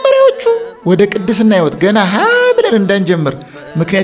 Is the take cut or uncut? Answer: uncut